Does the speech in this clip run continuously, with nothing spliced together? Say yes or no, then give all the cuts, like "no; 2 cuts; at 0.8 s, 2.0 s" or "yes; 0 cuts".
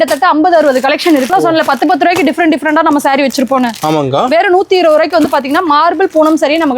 no; 1 cut; at 1.3 s